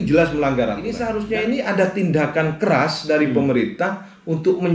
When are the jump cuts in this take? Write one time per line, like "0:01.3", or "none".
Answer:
0:01.0